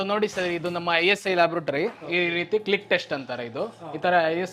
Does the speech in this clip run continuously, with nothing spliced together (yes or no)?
no